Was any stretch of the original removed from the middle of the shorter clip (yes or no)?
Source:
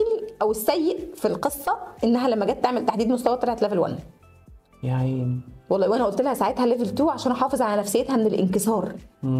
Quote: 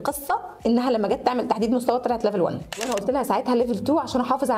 yes